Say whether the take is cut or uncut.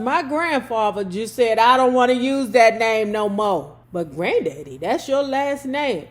cut